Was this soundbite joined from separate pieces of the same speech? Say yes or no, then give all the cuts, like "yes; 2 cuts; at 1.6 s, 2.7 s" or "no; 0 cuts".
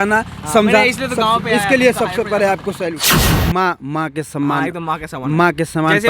yes; 1 cut; at 3.3 s